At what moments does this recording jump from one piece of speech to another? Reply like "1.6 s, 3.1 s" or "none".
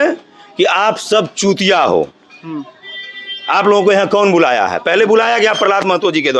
none